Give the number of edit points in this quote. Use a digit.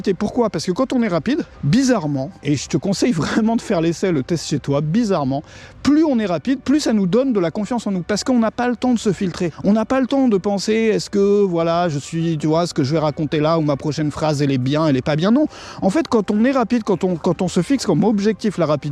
4